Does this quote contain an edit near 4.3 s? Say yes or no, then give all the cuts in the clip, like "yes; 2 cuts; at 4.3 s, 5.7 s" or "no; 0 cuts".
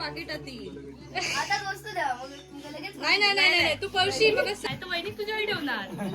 yes; 1 cut; at 4.3 s